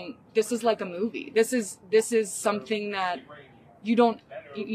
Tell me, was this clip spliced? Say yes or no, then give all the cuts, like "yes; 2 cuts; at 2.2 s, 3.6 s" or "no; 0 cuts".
no; 0 cuts